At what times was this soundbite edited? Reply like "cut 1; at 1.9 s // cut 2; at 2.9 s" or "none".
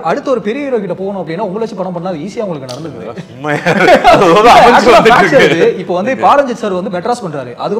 none